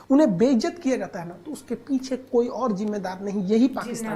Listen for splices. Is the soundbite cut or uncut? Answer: uncut